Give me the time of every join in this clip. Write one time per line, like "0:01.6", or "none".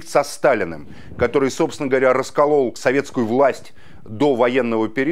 0:02.7